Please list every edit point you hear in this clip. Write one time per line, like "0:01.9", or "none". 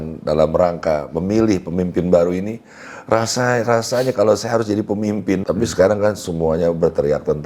0:05.4